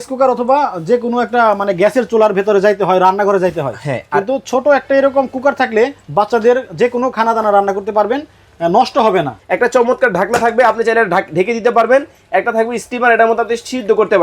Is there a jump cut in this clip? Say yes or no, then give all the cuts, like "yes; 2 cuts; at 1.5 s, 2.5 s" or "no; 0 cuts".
yes; 1 cut; at 9.4 s